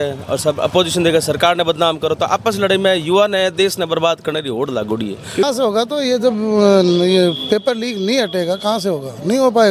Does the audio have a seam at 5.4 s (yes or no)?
yes